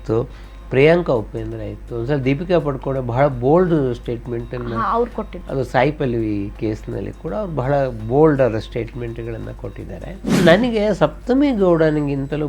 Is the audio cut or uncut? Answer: cut